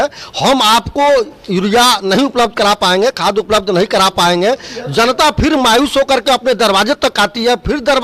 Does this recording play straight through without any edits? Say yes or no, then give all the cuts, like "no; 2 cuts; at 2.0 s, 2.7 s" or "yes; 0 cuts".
yes; 0 cuts